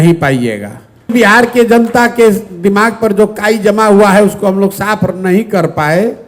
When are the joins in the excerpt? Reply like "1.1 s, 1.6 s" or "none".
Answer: 1.1 s